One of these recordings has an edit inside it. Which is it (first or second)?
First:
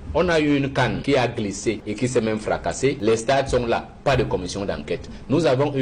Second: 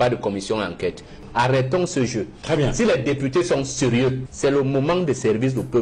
second